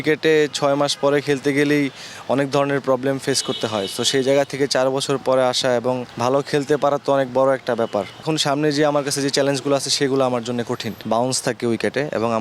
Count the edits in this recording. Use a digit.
3